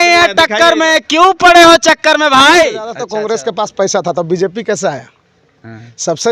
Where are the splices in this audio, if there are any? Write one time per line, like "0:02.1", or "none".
0:03.0